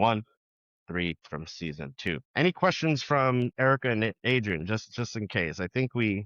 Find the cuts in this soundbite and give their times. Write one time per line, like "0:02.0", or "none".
0:02.3